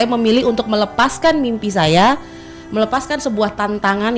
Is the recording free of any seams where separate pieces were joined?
yes; 0 cuts

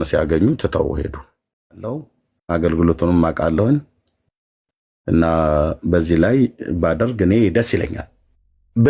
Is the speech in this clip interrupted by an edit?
yes; 1 cut; at 1.8 s

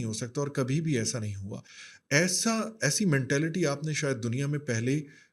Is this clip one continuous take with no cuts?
yes; 0 cuts

